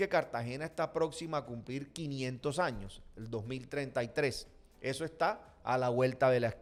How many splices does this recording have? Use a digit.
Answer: 0